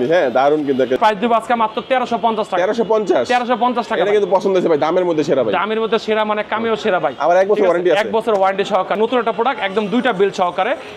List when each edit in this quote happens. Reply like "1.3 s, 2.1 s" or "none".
1.0 s, 9.0 s